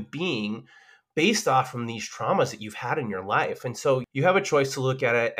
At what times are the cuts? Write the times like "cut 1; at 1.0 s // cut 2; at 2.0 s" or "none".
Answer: cut 1; at 4.1 s